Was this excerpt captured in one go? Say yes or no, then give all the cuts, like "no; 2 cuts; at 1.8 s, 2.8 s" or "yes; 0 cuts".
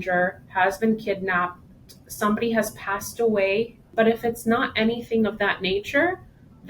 no; 1 cut; at 3.9 s